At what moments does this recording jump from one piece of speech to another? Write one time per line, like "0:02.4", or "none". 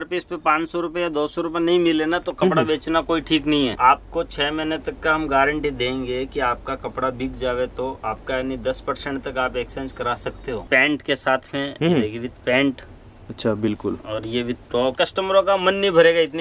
0:03.7
0:10.6
0:15.0